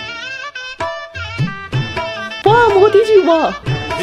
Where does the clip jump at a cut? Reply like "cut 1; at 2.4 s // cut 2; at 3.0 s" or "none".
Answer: cut 1; at 2.3 s